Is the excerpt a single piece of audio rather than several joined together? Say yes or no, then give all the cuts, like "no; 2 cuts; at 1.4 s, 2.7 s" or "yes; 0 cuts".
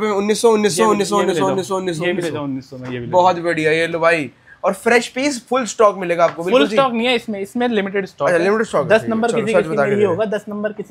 yes; 0 cuts